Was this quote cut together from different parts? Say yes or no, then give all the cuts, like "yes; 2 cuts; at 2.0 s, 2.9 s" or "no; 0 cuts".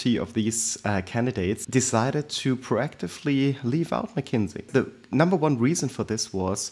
yes; 2 cuts; at 1.6 s, 4.7 s